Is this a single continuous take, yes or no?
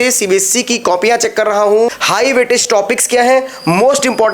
no